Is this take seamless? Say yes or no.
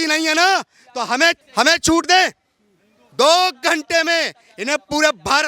no